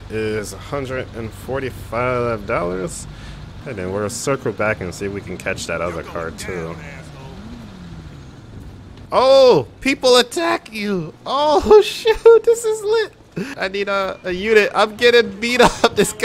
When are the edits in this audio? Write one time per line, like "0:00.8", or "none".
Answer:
0:03.5
0:13.6